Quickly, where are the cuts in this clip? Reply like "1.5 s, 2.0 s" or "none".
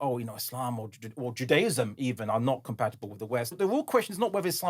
3.6 s